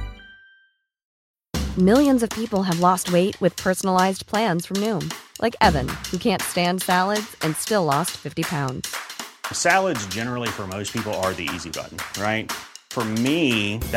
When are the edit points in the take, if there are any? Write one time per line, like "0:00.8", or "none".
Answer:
0:01.1